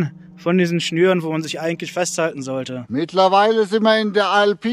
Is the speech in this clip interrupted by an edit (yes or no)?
yes